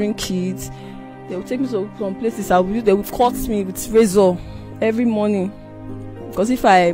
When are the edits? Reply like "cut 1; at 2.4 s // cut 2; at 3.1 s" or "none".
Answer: none